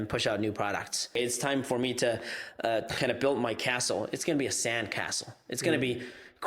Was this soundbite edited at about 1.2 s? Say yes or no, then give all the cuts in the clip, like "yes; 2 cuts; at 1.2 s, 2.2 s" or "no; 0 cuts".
yes; 1 cut; at 1.2 s